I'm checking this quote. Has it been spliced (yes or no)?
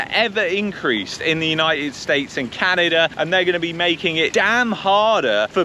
yes